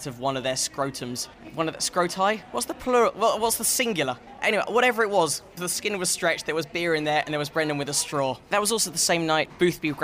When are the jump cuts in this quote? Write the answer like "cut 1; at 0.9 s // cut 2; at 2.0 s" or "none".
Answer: none